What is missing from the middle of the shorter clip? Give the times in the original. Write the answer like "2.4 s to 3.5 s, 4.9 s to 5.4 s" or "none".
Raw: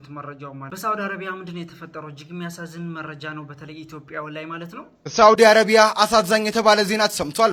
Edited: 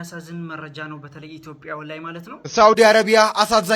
4.8 s to 4.9 s

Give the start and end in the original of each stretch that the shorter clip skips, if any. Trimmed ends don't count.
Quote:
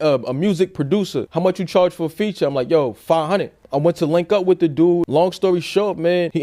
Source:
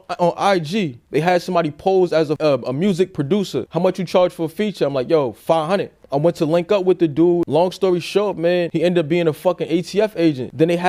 none

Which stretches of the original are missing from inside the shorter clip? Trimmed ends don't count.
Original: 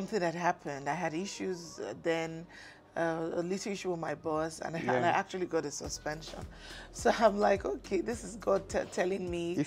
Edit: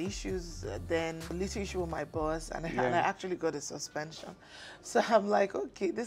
2.5 s to 3.4 s

